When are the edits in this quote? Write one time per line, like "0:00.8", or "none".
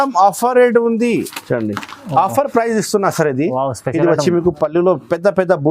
0:01.3